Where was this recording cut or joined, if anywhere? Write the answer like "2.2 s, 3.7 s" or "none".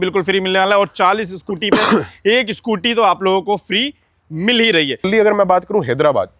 5.1 s